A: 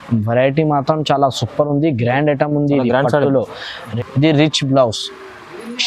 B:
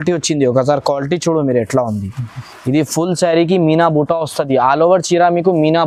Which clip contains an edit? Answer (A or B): A